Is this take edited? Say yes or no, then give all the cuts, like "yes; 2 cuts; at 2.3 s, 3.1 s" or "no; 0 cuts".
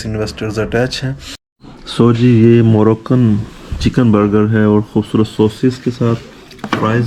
yes; 1 cut; at 1.5 s